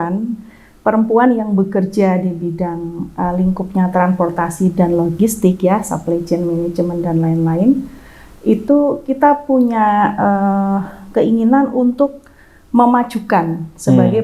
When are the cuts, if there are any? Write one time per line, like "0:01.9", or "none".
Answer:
none